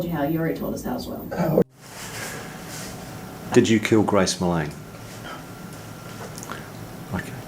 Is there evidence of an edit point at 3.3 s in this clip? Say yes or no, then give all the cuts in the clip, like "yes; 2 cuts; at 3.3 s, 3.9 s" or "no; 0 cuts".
no; 1 cut; at 1.6 s